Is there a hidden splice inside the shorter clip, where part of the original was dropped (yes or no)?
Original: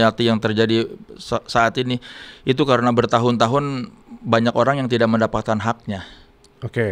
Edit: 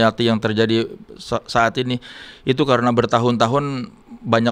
no